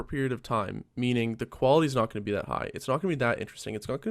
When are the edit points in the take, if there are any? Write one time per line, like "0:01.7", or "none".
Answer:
none